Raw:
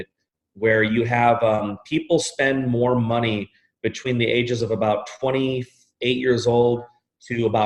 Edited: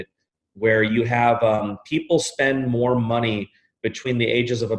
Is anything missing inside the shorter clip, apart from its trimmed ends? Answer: no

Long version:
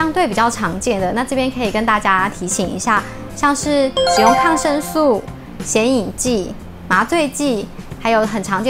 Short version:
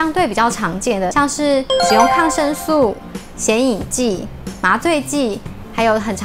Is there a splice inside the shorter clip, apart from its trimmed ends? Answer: yes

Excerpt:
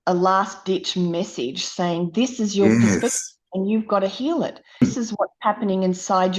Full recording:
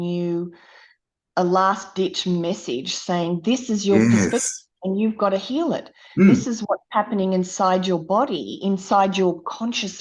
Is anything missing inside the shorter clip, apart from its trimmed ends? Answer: yes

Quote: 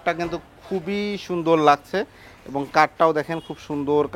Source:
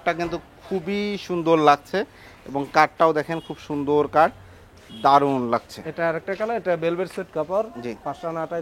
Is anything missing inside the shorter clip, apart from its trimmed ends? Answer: no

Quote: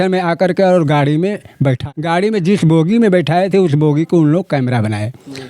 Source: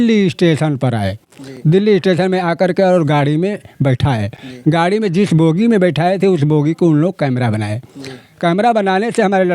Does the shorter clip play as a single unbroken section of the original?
no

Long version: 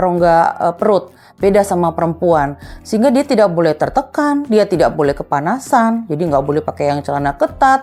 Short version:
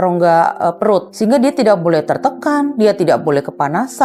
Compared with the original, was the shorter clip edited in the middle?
yes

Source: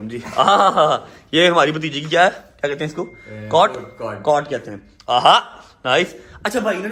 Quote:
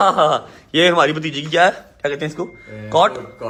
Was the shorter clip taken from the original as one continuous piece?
yes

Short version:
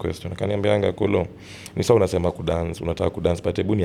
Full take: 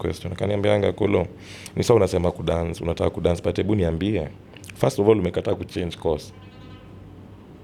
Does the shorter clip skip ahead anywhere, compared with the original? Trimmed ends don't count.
no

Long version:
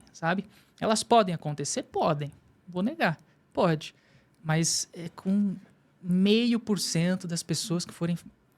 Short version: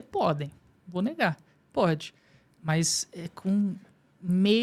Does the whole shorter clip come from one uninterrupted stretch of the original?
yes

